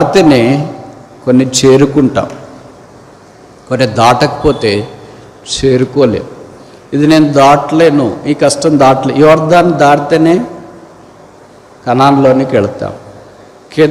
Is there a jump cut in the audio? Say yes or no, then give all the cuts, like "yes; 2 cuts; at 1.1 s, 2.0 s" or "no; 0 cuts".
no; 0 cuts